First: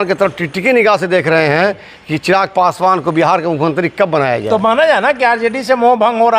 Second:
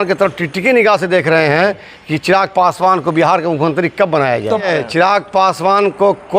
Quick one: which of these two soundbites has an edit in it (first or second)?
second